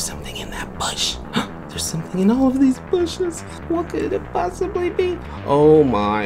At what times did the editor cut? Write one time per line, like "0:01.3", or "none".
0:01.8
0:03.5